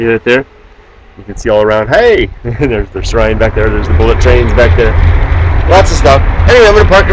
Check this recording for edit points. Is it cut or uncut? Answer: uncut